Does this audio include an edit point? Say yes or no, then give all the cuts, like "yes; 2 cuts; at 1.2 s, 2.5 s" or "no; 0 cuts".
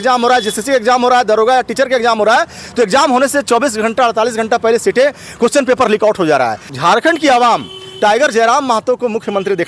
yes; 1 cut; at 6.7 s